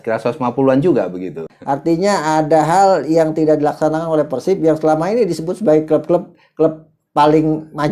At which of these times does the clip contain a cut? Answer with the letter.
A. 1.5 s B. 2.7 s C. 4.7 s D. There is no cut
A